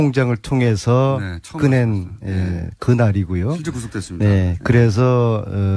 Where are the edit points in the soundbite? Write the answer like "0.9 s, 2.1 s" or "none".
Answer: 3.9 s